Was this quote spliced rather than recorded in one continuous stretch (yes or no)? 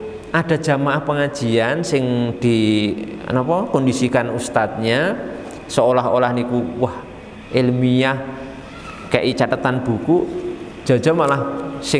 no